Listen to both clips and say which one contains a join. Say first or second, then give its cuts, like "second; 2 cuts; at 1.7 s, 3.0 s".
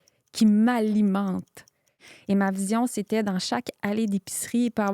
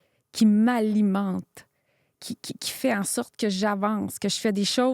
first; 1 cut; at 2.1 s